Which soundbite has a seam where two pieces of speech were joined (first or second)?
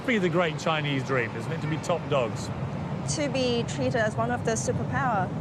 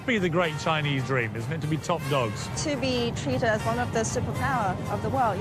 second